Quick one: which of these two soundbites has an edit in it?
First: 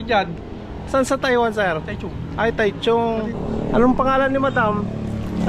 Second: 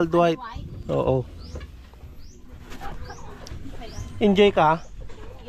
first; 1 cut; at 3.4 s

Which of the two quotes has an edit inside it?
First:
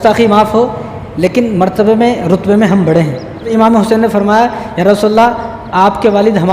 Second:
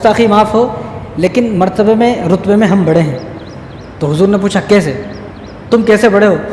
first; 1 cut; at 3.5 s

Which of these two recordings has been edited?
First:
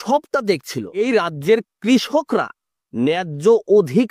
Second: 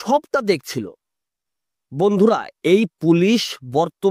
first; 1 cut; at 1.0 s

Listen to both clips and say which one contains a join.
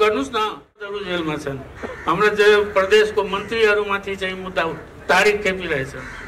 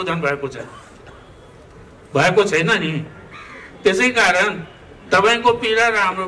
first; 1 cut; at 0.9 s

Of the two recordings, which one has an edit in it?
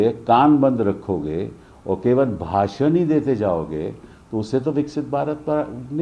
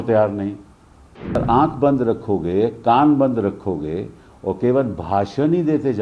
second; 1 cut; at 1.4 s

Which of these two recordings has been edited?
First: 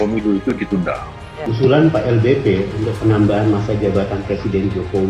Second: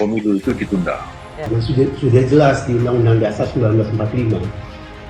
second; 1 cut; at 1.3 s

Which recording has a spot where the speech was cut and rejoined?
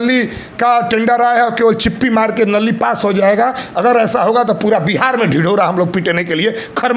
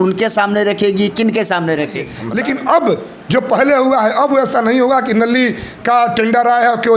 second; 1 cut; at 2.2 s

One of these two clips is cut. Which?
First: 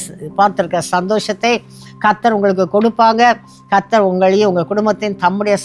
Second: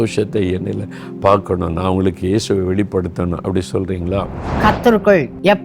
second; 1 cut; at 4.3 s

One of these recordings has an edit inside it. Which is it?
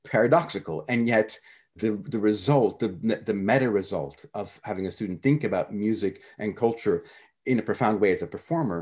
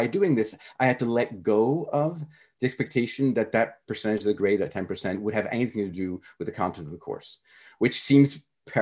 first; 1 cut; at 1.7 s

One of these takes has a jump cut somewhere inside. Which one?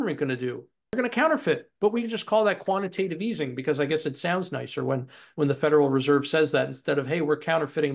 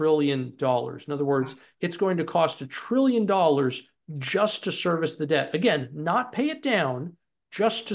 first; 1 cut; at 1.0 s

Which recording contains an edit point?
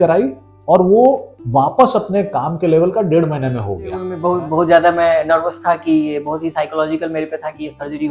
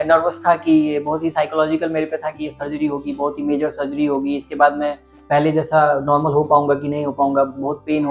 first; 1 cut; at 4.2 s

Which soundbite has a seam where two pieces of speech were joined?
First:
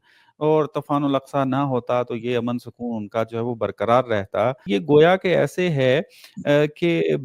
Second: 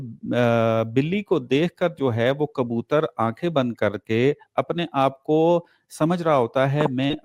first; 1 cut; at 4.7 s

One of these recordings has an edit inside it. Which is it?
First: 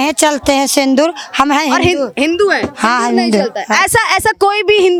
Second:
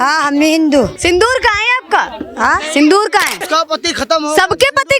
second; 2 cuts; at 0.9 s, 3.4 s

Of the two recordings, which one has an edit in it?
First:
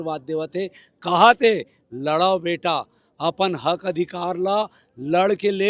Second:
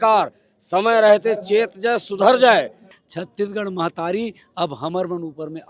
second; 1 cut; at 2.9 s

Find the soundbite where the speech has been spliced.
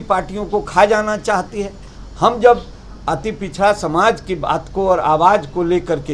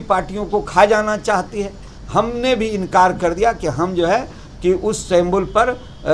second; 1 cut; at 1.9 s

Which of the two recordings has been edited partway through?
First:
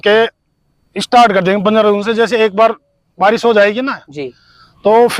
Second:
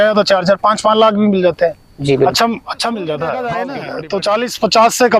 second; 1 cut; at 3.7 s

